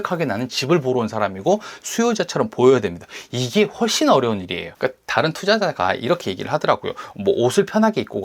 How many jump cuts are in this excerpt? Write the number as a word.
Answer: one